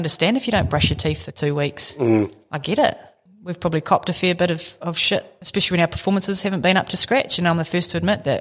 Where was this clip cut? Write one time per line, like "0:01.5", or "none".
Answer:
0:03.2
0:05.4